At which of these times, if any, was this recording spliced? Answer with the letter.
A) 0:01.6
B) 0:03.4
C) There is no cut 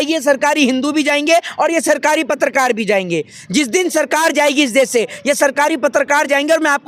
C